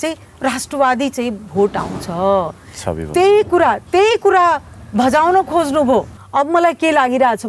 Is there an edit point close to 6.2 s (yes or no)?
yes